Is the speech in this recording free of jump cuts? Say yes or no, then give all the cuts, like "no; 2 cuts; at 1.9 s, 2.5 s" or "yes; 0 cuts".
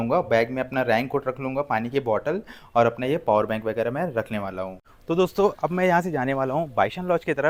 yes; 0 cuts